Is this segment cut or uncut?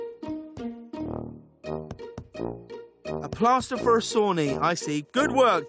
cut